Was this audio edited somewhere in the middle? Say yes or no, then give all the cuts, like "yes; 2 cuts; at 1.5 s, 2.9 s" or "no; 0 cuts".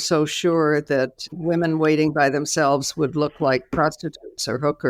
no; 0 cuts